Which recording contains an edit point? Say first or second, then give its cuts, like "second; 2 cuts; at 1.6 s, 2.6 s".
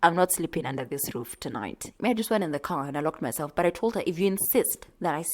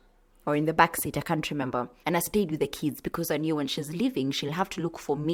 first; 1 cut; at 1.9 s